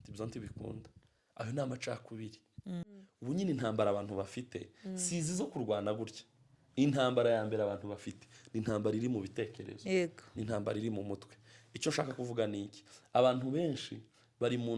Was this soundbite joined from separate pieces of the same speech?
yes; 1 cut; at 3.1 s

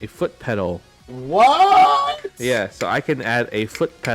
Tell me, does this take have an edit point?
yes; 1 cut; at 1.2 s

